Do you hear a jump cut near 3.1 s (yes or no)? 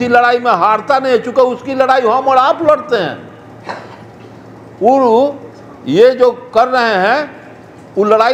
no